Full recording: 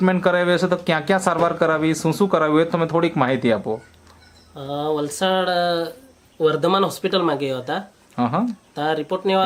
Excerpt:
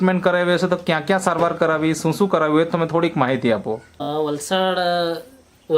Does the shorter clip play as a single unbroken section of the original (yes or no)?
no